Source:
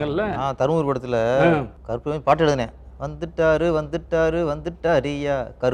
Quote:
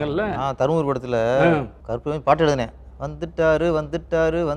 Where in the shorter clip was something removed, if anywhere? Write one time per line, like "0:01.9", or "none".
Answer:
none